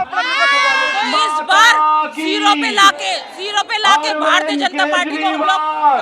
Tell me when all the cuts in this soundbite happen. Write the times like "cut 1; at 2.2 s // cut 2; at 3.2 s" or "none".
cut 1; at 0.9 s // cut 2; at 3.3 s